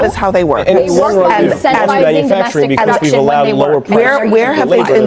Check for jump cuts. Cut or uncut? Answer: uncut